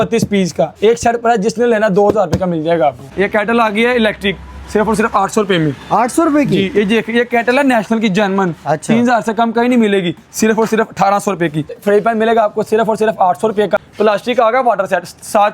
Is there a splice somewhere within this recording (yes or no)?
yes